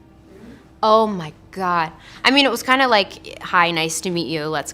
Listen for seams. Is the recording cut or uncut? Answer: cut